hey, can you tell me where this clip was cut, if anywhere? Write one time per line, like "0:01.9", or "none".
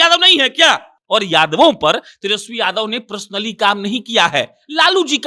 0:00.9